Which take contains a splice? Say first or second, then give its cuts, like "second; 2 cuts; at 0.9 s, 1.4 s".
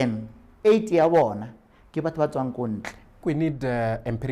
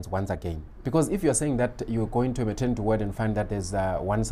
first; 1 cut; at 3.2 s